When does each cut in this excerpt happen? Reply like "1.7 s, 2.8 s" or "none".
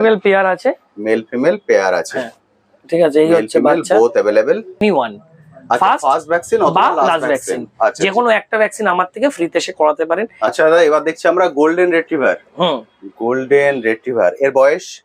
4.8 s, 10.5 s